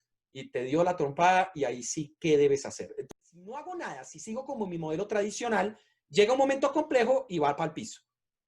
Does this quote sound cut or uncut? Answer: cut